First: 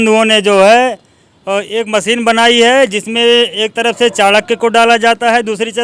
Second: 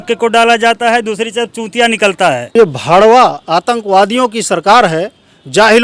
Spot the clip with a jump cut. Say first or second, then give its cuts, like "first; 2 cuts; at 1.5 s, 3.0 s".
second; 1 cut; at 2.4 s